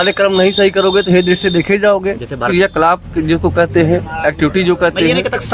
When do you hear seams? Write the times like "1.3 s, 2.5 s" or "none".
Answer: 2.5 s